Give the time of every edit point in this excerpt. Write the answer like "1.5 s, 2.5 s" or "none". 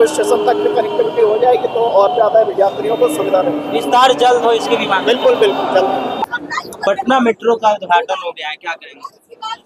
none